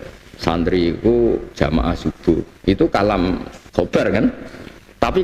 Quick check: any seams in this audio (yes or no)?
yes